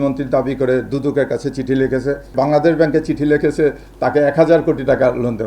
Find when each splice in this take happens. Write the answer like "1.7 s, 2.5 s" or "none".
2.3 s